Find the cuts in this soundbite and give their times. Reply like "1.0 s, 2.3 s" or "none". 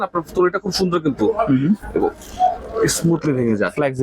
none